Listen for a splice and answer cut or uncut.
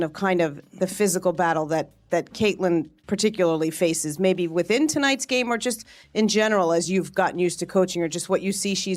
uncut